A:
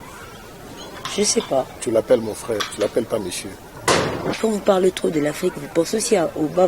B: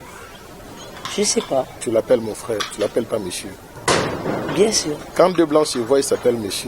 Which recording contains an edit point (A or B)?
A